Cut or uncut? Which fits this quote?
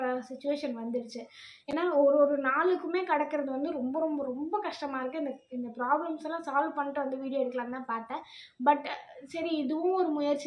uncut